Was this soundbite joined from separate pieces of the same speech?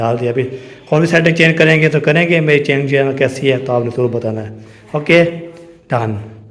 no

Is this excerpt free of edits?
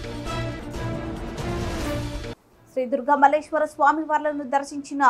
yes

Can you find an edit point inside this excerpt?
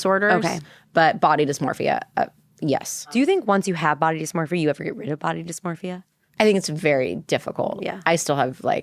yes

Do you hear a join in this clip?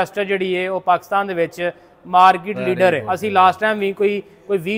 yes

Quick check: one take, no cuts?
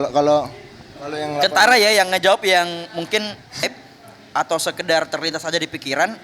no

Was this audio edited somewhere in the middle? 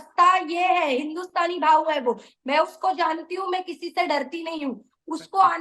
no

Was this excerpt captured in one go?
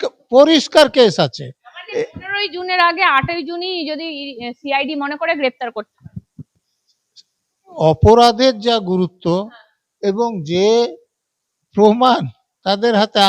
yes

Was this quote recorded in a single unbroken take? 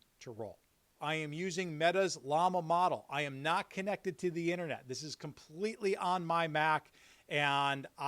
no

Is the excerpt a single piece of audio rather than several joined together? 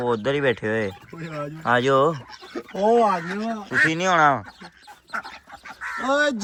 yes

